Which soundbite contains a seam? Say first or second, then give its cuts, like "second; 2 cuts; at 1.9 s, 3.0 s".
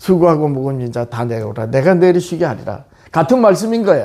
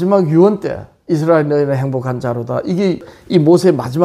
second; 1 cut; at 3.1 s